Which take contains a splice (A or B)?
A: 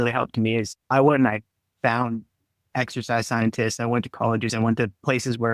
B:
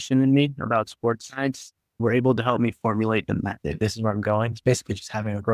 B